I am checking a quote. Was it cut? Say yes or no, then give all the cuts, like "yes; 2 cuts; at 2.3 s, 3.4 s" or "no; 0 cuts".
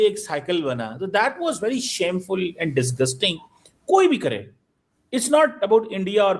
no; 0 cuts